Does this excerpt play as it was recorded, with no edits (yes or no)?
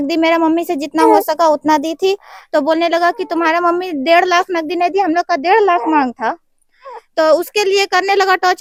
yes